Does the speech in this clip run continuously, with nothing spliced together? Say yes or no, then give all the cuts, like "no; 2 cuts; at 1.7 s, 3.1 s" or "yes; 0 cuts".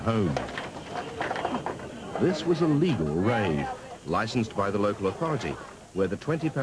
no; 1 cut; at 1.8 s